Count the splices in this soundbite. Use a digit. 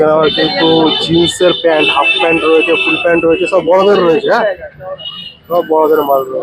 0